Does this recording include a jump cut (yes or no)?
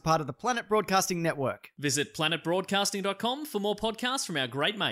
no